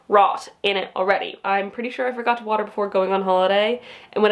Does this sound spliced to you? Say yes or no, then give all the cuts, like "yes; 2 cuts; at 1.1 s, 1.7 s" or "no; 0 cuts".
yes; 1 cut; at 1.4 s